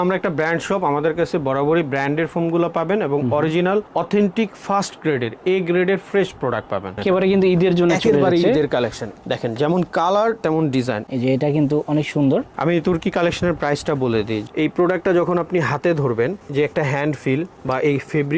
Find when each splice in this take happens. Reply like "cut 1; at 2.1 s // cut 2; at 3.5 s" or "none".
cut 1; at 7.0 s // cut 2; at 11.0 s // cut 3; at 14.4 s